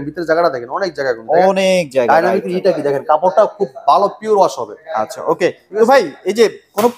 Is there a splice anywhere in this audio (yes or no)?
no